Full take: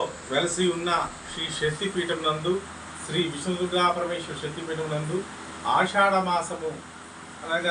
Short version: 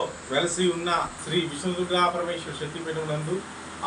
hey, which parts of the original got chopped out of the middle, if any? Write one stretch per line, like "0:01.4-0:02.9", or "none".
0:01.2-0:03.0